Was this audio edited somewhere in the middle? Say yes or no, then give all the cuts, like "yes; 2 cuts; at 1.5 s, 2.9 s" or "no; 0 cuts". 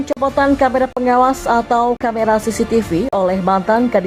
no; 0 cuts